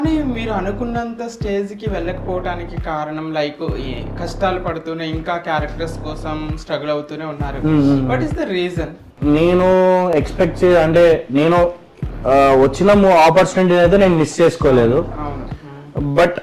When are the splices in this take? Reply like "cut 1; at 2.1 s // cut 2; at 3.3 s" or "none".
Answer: cut 1; at 9.1 s